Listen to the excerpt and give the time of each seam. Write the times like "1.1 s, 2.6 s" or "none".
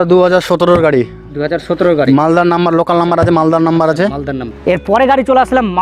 4.5 s